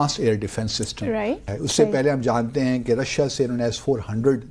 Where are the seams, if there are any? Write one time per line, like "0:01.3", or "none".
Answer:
0:01.5